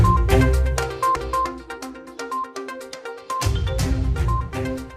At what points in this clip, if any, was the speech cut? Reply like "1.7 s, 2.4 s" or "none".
1.0 s